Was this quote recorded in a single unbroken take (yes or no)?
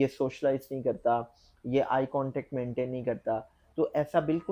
yes